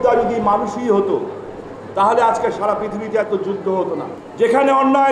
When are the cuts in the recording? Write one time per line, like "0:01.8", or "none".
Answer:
0:04.2

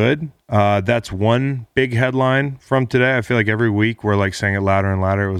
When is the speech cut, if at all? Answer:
none

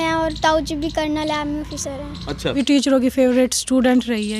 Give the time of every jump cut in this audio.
0:02.6

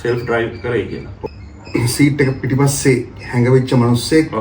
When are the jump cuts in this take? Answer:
0:01.1

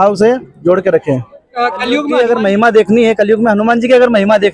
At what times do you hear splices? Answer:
0:02.1

